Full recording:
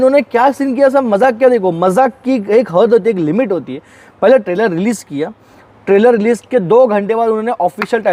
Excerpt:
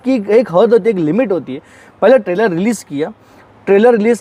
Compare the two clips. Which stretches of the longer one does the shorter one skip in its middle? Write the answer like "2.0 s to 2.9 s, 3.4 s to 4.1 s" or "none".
none